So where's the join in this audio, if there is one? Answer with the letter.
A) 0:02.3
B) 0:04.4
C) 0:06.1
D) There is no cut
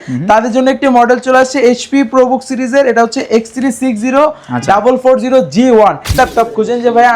C